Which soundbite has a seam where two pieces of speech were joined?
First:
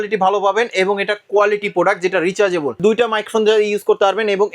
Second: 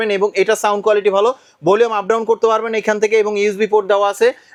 first; 1 cut; at 2.8 s

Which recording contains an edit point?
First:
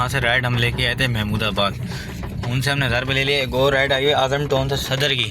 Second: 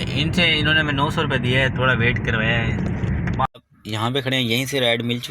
second; 1 cut; at 3.5 s

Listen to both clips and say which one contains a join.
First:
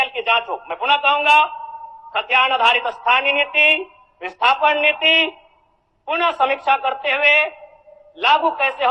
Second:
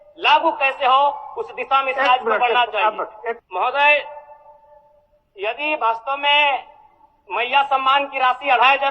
second; 1 cut; at 3.4 s

